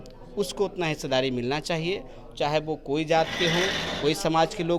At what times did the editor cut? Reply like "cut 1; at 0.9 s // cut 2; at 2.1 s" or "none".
none